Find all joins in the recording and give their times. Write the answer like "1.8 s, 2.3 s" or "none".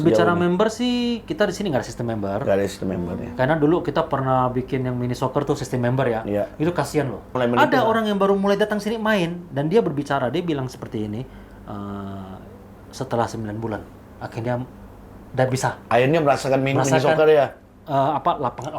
7.4 s